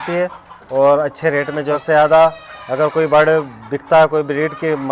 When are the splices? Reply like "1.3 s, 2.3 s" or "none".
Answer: 1.8 s